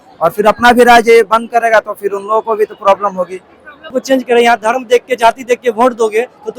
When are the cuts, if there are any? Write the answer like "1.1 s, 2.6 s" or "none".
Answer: 4.0 s